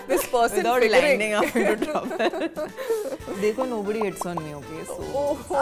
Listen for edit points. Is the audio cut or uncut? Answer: uncut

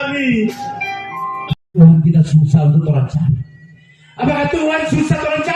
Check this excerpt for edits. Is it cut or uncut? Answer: cut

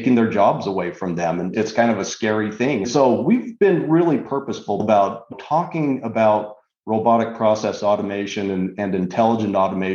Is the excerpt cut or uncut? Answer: cut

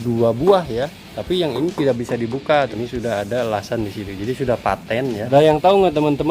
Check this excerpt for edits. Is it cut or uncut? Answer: cut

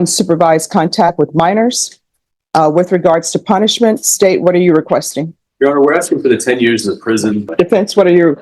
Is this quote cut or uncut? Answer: cut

